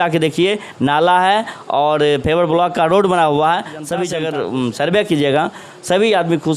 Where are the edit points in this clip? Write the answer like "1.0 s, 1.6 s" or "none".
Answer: 4.1 s